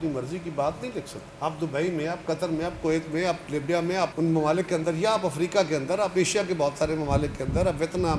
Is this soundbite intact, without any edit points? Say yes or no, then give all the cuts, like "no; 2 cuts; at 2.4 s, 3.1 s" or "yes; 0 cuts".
yes; 0 cuts